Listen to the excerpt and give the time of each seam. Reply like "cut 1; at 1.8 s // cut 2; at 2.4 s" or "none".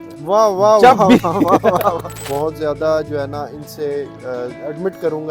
cut 1; at 2.2 s